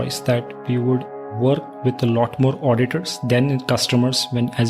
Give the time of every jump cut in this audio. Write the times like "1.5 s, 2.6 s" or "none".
1.3 s

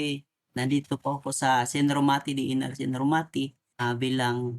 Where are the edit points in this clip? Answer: 3.6 s

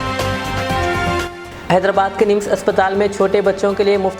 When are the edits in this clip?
1.2 s

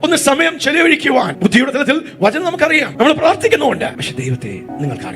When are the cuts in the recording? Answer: 1.3 s, 2.9 s, 4.2 s

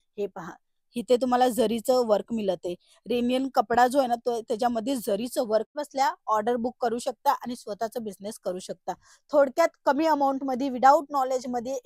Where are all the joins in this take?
5.7 s

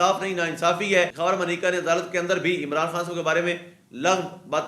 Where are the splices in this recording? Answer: 1.1 s

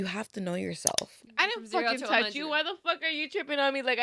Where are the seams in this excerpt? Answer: 1.3 s

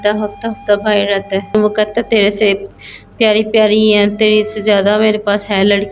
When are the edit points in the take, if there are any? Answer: 1.5 s

